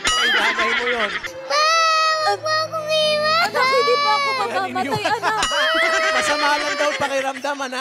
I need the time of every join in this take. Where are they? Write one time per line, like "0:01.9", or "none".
0:01.3